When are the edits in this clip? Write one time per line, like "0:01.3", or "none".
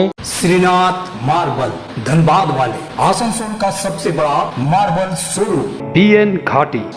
none

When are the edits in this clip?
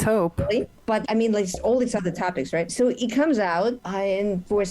0:01.0
0:02.7
0:03.8

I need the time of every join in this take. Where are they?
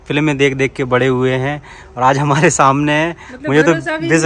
none

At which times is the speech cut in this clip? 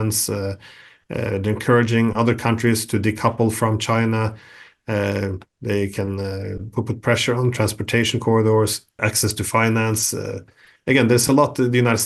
none

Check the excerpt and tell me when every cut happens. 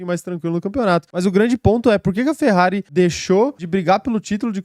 0:01.1
0:02.8
0:03.6

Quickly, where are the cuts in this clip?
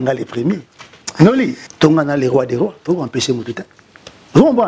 0:01.6

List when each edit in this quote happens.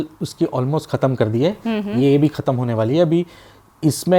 none

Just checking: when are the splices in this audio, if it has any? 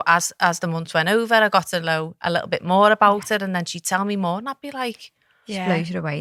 none

